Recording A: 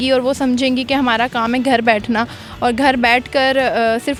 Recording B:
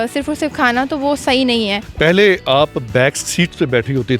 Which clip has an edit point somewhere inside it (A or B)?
B